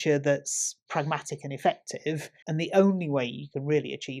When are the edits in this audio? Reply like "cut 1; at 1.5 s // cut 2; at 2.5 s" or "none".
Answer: cut 1; at 0.8 s // cut 2; at 2.4 s